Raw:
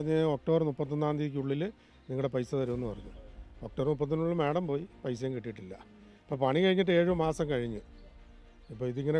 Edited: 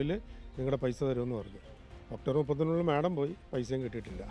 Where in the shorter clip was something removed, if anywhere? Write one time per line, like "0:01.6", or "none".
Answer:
none